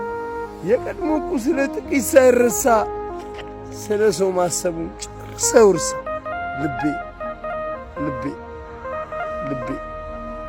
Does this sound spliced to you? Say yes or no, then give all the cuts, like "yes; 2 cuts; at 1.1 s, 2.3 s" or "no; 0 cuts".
no; 0 cuts